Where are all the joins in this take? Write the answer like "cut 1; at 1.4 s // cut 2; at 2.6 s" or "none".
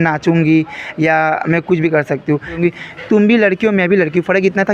cut 1; at 2.6 s